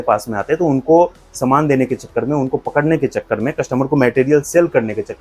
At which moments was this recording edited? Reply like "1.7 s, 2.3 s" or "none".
none